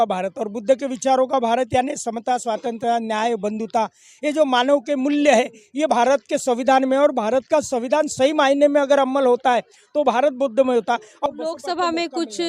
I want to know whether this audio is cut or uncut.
cut